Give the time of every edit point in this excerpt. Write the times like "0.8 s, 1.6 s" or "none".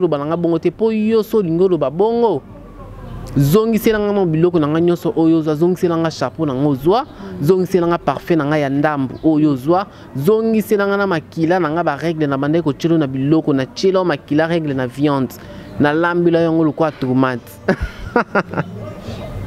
none